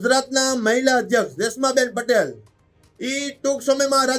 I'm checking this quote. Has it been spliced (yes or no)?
no